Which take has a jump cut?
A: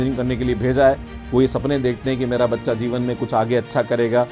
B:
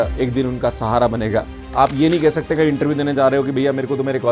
B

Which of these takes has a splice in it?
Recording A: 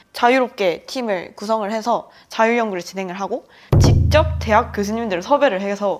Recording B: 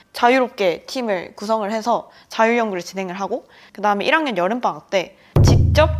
A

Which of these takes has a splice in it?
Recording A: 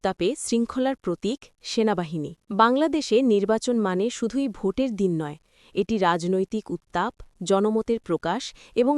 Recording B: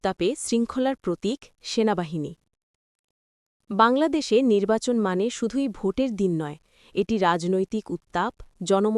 A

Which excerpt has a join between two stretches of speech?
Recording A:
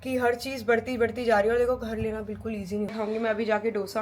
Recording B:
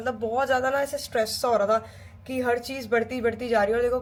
A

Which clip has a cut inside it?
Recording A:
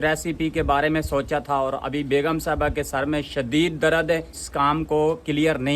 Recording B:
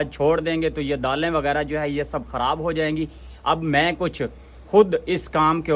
A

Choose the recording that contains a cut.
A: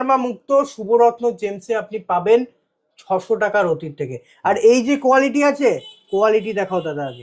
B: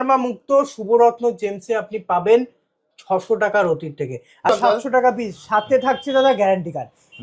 B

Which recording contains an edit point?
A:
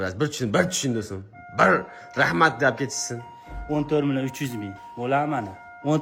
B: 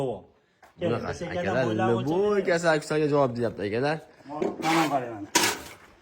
B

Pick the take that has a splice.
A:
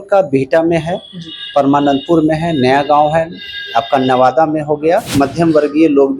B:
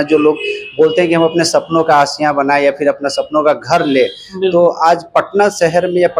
A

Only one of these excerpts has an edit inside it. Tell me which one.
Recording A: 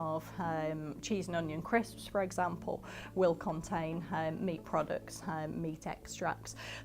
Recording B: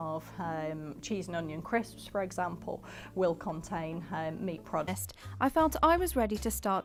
A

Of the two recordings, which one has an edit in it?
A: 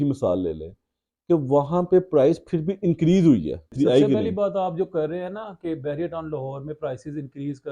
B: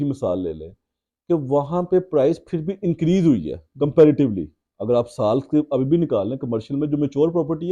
A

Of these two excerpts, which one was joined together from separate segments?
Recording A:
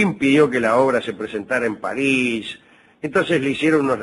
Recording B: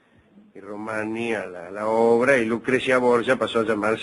B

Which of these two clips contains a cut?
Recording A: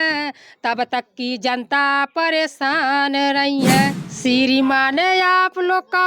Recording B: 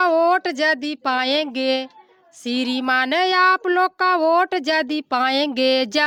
A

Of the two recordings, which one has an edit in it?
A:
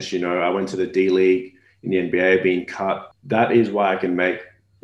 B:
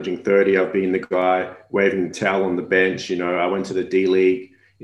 A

